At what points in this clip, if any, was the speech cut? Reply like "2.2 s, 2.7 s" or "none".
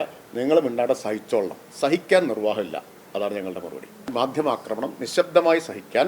4.1 s